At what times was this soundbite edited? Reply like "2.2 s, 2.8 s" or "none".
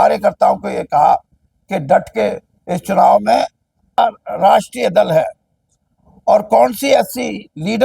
4.0 s